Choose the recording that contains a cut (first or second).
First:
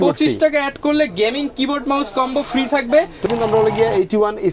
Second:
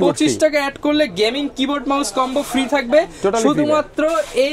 first